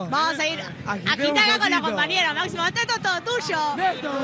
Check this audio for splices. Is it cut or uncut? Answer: uncut